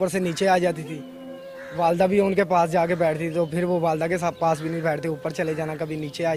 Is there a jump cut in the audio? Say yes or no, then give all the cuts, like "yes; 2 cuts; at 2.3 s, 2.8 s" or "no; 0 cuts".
no; 0 cuts